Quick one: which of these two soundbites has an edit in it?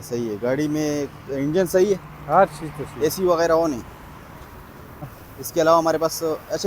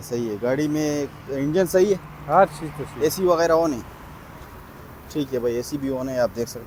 first; 1 cut; at 5.1 s

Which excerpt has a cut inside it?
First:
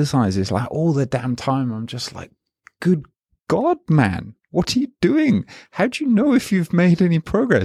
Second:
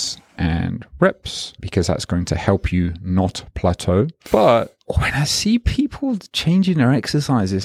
second; 4 cuts; at 1.6 s, 4.2 s, 4.8 s, 6.2 s

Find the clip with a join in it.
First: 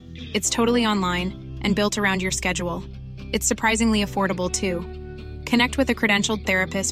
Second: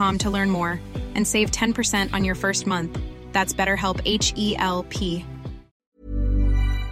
second; 1 cut; at 5.8 s

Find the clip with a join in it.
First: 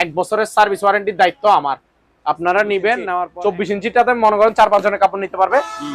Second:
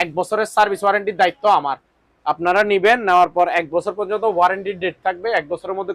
first; 1 cut; at 3.3 s

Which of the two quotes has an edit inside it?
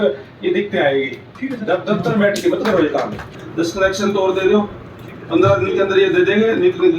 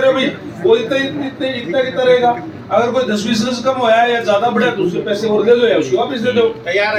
first; 2 cuts; at 1.2 s, 3.2 s

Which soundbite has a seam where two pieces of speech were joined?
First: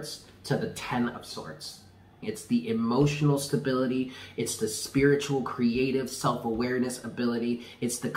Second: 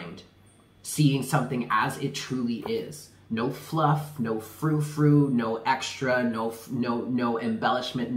first; 1 cut; at 2.2 s

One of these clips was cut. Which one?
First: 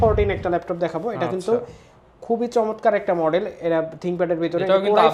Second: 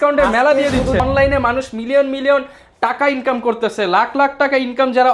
second; 1 cut; at 1.0 s

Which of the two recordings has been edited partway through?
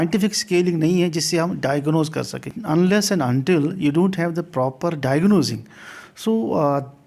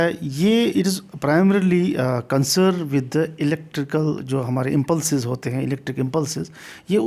first; 1 cut; at 2.6 s

